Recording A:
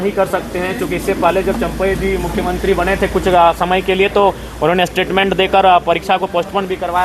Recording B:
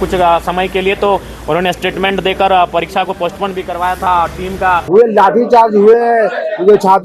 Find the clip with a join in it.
B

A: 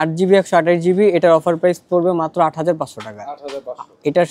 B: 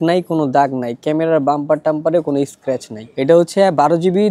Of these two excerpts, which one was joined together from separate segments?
B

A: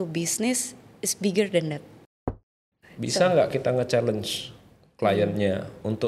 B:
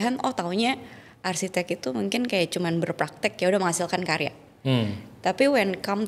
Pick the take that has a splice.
A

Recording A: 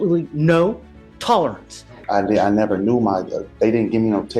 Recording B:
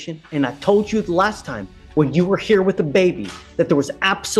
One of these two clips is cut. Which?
A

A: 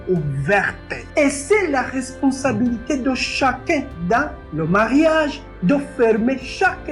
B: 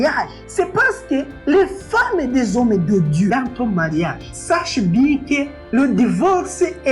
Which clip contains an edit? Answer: B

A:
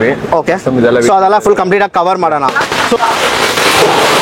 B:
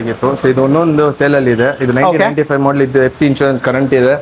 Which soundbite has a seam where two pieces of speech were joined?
A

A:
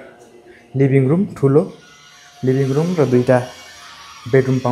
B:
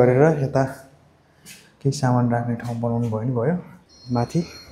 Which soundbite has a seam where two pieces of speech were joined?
B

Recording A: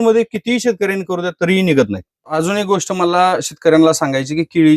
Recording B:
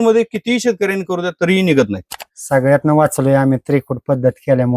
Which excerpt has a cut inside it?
B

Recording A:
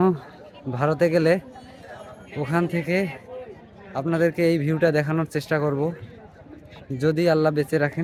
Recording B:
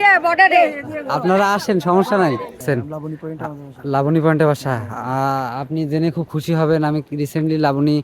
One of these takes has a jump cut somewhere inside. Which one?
B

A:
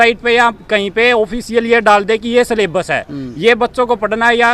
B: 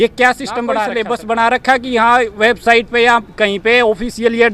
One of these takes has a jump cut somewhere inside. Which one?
B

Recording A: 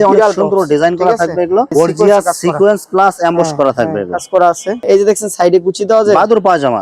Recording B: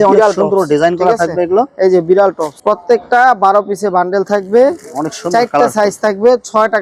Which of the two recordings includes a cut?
A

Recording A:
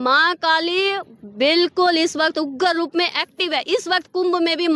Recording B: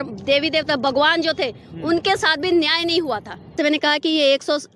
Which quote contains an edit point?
B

